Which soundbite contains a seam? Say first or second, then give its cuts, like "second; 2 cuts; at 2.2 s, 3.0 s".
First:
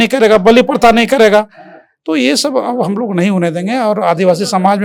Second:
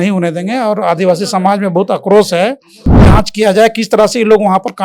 second; 1 cut; at 3.1 s